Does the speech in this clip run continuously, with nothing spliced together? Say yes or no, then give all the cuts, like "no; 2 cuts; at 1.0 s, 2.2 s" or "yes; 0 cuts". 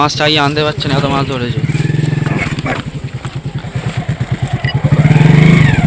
no; 1 cut; at 3.6 s